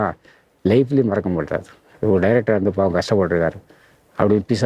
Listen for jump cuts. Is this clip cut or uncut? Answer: uncut